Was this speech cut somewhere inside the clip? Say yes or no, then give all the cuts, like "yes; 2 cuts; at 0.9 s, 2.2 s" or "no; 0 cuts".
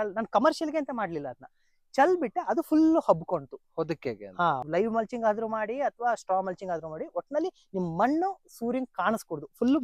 yes; 1 cut; at 4.6 s